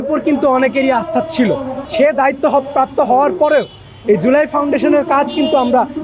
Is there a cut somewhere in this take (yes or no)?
yes